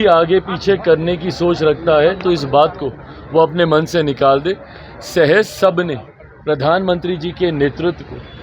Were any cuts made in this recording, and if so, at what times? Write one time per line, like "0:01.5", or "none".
none